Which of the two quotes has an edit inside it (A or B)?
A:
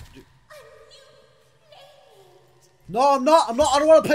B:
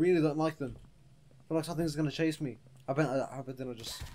B